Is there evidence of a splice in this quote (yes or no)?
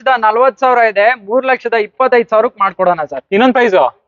no